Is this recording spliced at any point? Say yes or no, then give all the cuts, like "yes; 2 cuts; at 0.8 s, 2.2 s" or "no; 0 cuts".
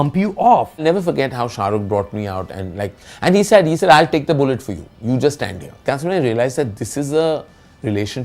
yes; 2 cuts; at 0.8 s, 5.8 s